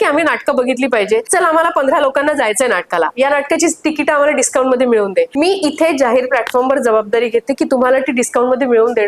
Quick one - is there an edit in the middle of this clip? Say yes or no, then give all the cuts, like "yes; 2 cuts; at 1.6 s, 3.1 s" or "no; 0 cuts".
yes; 2 cuts; at 1.3 s, 5.3 s